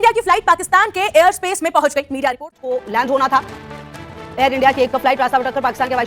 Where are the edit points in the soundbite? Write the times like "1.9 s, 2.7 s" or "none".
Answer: 2.3 s